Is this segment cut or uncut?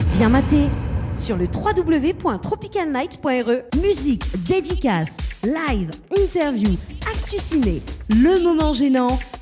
cut